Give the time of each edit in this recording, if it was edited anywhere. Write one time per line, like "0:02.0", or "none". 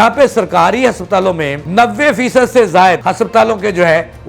0:01.6
0:03.0